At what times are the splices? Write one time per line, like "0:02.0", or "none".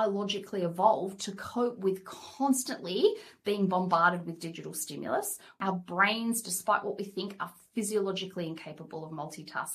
0:05.6